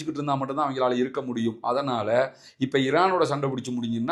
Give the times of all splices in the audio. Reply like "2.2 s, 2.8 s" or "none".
none